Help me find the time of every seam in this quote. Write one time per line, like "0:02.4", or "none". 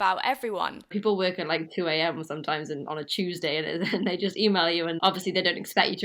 0:00.9
0:05.0